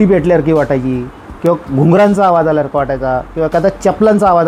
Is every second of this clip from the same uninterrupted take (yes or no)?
yes